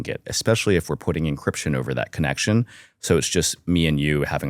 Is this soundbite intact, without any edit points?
yes; 0 cuts

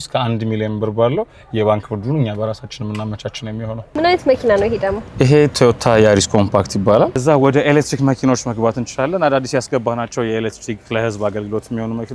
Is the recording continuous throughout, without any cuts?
no; 2 cuts; at 3.9 s, 7.1 s

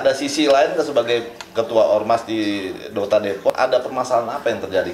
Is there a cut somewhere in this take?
yes; 1 cut; at 3.5 s

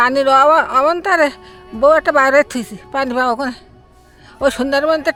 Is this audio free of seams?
yes; 0 cuts

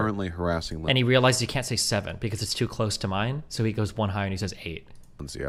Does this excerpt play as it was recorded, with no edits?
yes; 0 cuts

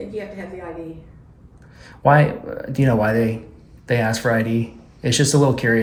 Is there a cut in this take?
no; 0 cuts

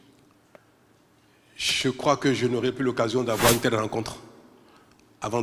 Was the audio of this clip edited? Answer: no; 0 cuts

